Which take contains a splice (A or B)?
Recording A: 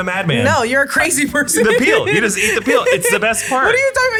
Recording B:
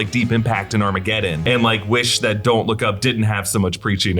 B